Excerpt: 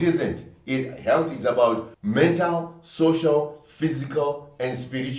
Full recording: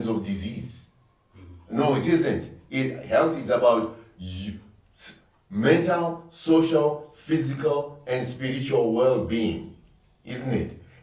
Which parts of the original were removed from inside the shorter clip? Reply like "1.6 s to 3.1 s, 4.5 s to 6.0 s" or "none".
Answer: 4.0 s to 5.4 s